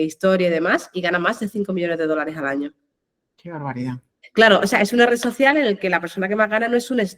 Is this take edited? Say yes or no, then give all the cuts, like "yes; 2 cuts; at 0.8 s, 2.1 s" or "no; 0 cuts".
no; 0 cuts